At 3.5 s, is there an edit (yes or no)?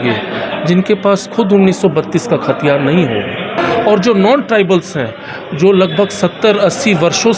yes